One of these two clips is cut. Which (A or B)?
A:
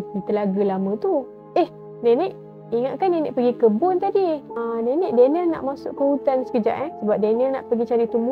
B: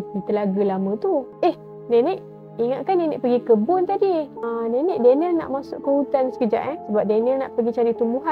B